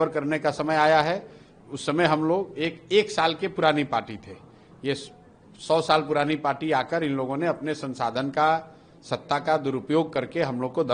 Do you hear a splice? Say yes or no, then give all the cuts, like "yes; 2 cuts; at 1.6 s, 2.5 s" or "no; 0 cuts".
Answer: no; 0 cuts